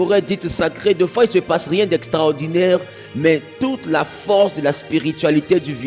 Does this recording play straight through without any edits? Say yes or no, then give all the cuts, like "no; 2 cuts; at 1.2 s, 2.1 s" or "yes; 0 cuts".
yes; 0 cuts